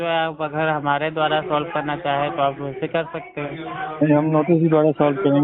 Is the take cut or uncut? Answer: uncut